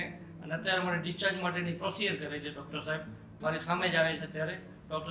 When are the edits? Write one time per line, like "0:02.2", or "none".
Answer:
none